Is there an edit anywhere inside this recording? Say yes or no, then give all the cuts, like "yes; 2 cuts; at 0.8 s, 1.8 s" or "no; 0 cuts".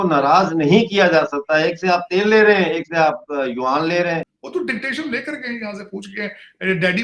yes; 1 cut; at 4.4 s